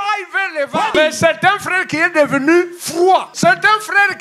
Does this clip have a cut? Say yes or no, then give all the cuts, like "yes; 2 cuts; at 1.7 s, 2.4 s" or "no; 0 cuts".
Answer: yes; 2 cuts; at 1.0 s, 3.0 s